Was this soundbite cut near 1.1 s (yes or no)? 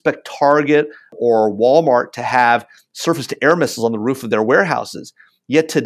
yes